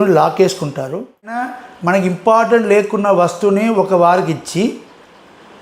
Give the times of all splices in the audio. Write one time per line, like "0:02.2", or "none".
0:01.5